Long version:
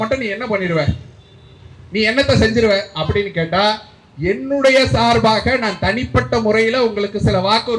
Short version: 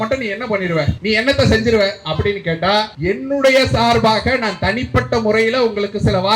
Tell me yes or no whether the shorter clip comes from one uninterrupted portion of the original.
no